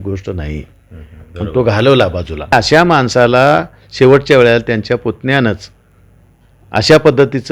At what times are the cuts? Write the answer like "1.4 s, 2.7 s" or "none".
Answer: 2.5 s